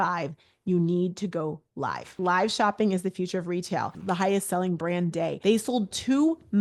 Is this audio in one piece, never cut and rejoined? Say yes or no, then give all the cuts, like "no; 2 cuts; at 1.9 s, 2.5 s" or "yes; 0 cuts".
no; 3 cuts; at 2.1 s, 4.0 s, 5.4 s